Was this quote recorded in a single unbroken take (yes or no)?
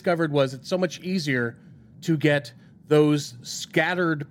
yes